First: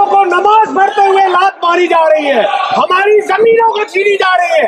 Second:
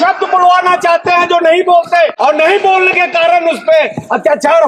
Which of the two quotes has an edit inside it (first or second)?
second